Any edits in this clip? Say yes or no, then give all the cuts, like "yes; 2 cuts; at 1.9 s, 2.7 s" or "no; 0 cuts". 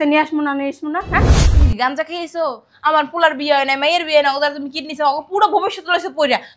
yes; 1 cut; at 1.5 s